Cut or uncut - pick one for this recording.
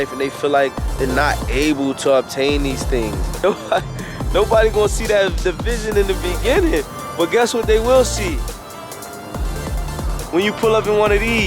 cut